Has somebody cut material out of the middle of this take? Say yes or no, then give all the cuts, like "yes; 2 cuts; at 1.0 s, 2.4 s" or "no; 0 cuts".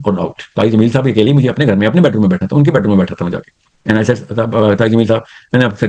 no; 0 cuts